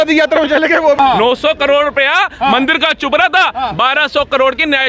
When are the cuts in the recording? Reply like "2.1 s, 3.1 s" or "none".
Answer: 1.0 s